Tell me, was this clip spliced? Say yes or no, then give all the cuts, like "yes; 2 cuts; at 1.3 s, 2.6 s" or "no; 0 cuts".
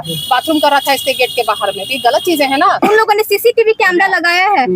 yes; 1 cut; at 2.8 s